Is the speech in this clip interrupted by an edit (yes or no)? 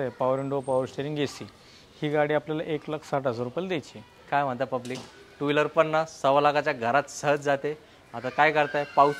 no